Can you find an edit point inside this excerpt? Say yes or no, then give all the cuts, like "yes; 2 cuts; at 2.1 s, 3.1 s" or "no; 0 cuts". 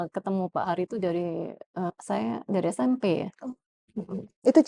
yes; 1 cut; at 1.9 s